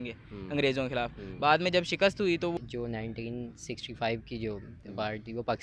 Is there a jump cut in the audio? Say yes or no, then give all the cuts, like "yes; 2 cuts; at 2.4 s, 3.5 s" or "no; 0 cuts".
yes; 1 cut; at 2.5 s